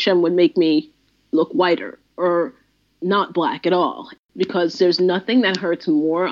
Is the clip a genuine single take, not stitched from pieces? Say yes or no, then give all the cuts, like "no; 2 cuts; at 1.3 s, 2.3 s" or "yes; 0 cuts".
no; 1 cut; at 4.0 s